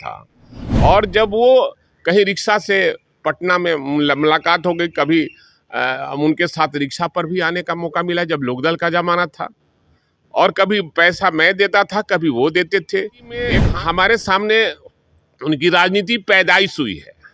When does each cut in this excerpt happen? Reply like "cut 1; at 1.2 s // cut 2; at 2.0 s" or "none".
cut 1; at 13.6 s

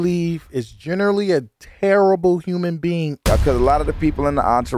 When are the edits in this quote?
cut 1; at 3.2 s

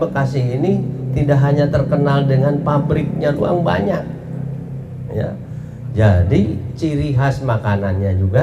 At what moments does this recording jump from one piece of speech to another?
none

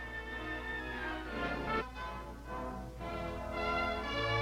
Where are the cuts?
none

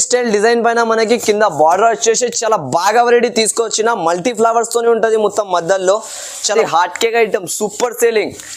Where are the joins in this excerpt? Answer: cut 1; at 6.5 s

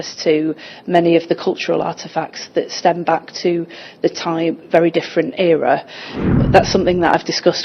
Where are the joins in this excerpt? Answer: cut 1; at 6.2 s

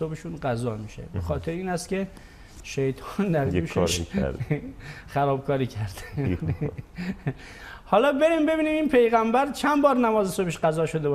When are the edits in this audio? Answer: none

